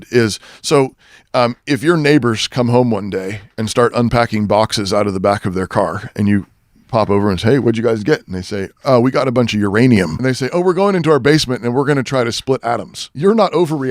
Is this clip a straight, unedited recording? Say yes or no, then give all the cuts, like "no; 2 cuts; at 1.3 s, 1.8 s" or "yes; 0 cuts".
no; 2 cuts; at 10.2 s, 13.0 s